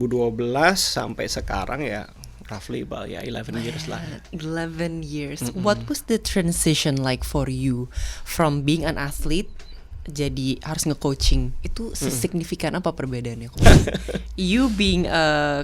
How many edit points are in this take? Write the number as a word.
one